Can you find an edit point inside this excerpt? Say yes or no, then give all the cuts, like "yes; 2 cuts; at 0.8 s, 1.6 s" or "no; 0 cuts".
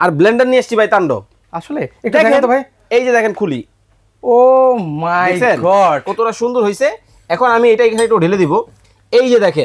no; 0 cuts